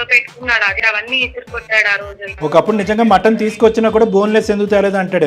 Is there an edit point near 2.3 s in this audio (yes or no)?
yes